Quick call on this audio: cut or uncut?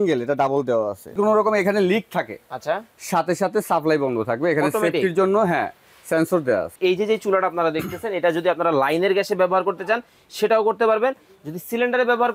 cut